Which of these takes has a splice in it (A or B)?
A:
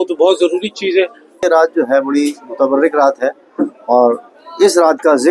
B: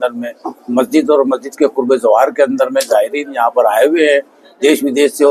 A